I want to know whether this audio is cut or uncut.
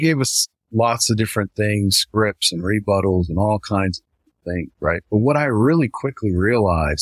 uncut